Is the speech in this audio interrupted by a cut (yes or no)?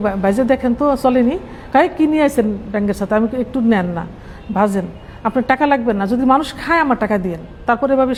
no